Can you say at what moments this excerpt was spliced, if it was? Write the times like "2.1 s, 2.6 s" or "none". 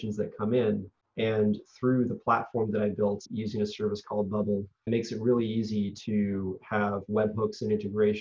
1.0 s, 3.3 s, 4.9 s